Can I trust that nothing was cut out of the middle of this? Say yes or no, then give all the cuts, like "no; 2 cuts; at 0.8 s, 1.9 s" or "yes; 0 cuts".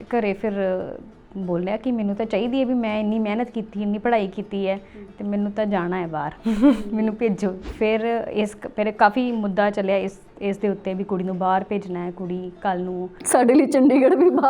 no; 1 cut; at 7.6 s